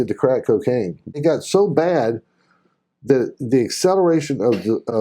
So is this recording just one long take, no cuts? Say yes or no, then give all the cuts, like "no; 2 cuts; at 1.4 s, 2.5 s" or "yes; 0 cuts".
no; 1 cut; at 1.2 s